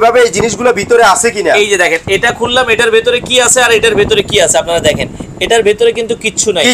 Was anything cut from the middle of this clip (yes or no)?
no